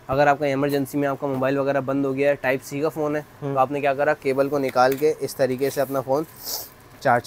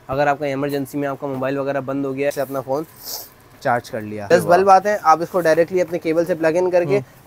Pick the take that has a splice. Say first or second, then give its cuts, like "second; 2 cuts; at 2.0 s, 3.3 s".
second; 2 cuts; at 2.3 s, 4.3 s